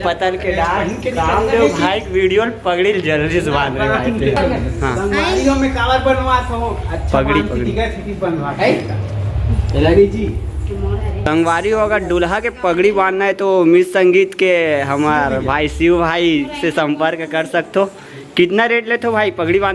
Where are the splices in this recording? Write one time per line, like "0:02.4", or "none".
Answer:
none